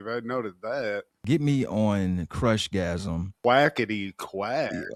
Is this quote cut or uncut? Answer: uncut